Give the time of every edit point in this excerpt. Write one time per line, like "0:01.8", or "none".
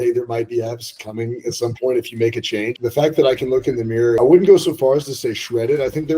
0:02.7
0:04.2